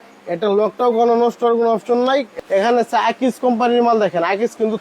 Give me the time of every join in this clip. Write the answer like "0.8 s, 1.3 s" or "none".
2.3 s